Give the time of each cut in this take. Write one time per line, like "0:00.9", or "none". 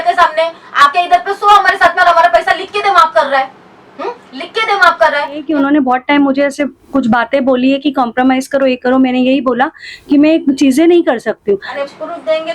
0:05.4
0:11.7